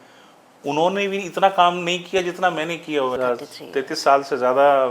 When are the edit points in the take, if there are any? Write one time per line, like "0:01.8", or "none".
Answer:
0:03.2